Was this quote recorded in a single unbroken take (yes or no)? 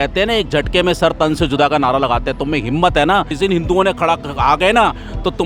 no